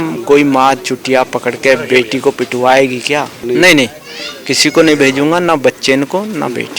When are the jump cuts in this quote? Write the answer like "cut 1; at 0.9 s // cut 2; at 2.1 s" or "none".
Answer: cut 1; at 3.4 s